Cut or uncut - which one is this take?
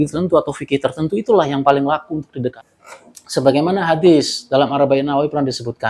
cut